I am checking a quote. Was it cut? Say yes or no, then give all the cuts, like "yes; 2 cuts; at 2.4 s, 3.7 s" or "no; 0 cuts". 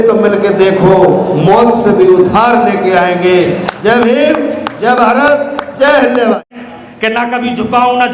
no; 0 cuts